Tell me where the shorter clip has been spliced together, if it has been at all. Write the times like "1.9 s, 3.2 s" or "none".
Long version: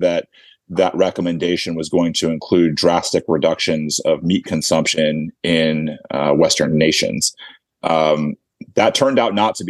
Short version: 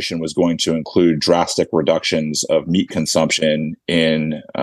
none